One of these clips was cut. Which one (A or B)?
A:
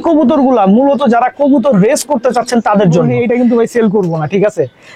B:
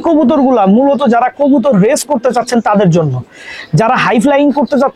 A